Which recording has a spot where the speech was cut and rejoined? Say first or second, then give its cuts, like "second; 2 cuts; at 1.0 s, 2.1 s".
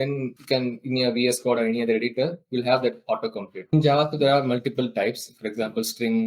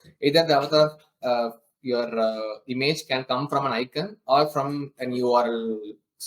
first; 1 cut; at 3.7 s